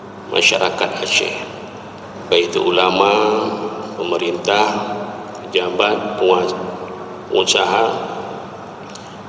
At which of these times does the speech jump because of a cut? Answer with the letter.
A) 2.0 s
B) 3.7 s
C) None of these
A